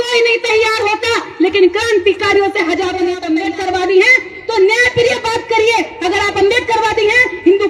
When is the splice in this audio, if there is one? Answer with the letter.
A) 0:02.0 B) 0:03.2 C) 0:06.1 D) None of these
B